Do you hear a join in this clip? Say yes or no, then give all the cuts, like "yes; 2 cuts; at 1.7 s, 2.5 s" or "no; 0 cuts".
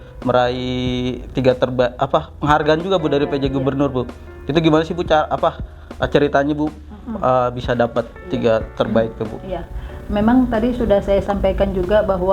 no; 0 cuts